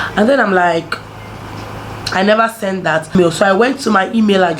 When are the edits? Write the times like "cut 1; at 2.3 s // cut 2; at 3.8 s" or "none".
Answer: cut 1; at 3.1 s